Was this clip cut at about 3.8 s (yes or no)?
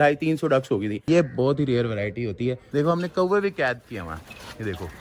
no